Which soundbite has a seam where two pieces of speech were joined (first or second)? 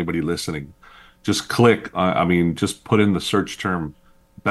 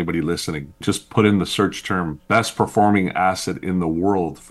second